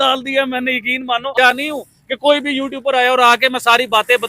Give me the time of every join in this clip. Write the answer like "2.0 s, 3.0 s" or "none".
1.3 s